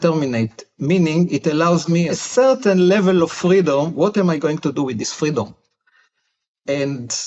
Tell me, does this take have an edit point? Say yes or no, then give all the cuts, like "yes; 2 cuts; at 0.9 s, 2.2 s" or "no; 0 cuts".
yes; 1 cut; at 2.1 s